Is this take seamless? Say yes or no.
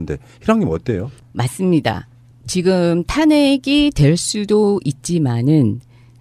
yes